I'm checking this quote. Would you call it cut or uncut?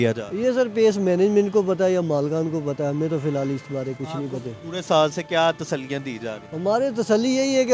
uncut